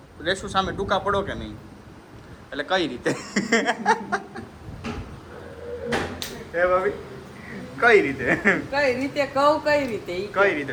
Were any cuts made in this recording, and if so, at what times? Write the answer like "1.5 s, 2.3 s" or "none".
none